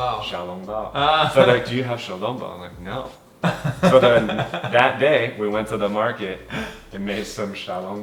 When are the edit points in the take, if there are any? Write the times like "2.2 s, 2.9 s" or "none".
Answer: none